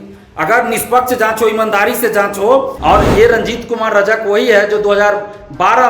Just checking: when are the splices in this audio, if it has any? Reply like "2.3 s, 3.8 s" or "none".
2.7 s